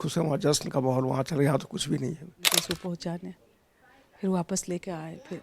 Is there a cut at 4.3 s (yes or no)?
no